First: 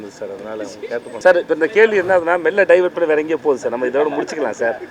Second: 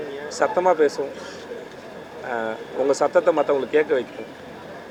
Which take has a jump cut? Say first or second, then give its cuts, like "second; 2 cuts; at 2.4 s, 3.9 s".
first; 1 cut; at 1.1 s